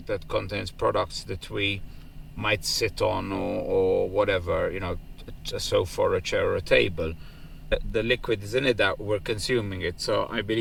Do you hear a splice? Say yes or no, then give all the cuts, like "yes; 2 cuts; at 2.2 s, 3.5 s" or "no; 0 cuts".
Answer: no; 0 cuts